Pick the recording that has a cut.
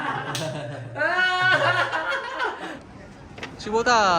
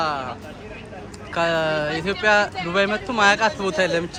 first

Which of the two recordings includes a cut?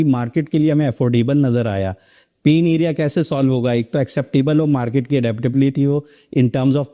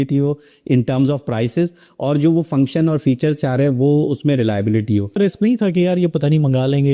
second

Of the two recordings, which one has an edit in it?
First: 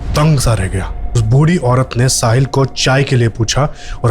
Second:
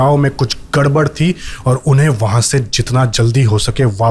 first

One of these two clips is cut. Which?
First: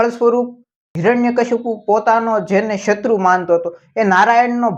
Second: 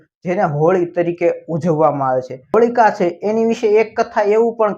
second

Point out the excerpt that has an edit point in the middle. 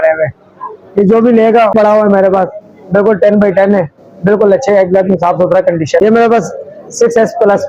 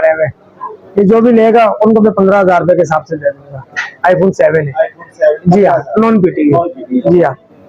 first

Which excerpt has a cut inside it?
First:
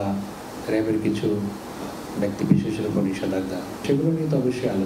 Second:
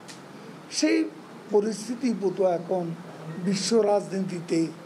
first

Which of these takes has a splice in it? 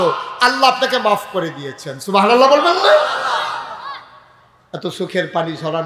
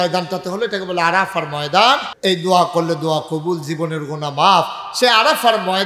second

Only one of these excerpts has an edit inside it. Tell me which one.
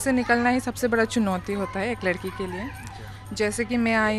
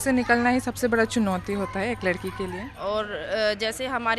second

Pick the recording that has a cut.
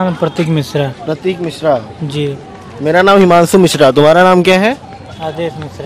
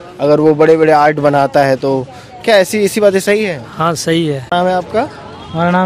second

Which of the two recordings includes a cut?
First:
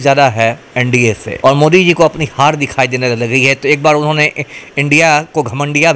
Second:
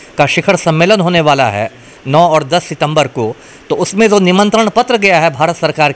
first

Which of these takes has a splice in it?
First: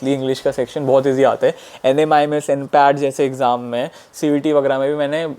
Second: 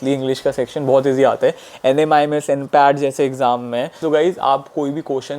second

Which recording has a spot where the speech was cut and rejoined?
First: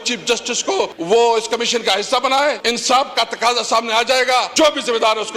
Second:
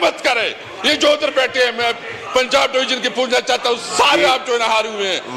first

